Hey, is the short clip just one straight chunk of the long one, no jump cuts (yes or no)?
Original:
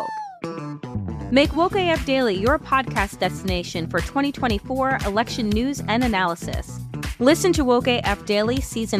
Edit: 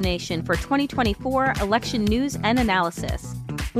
yes